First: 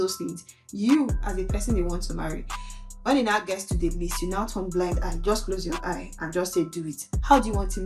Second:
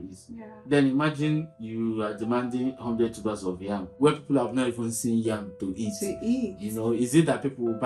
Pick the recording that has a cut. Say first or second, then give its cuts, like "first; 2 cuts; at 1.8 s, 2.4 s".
second; 2 cuts; at 1.6 s, 3.9 s